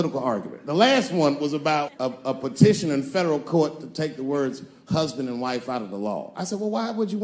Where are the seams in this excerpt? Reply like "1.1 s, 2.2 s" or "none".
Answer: 2.0 s

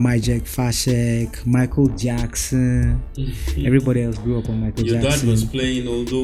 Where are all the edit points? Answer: none

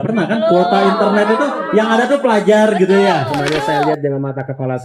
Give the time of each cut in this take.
3.4 s

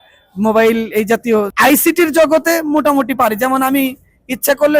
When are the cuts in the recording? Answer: 1.5 s

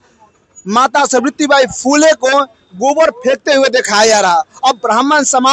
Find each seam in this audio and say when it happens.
none

